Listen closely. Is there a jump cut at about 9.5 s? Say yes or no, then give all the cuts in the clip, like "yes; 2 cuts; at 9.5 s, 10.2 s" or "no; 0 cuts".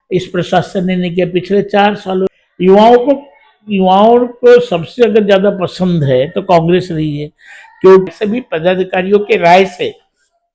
no; 2 cuts; at 2.4 s, 8.1 s